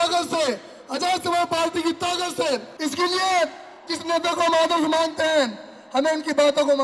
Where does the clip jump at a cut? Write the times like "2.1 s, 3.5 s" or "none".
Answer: 2.8 s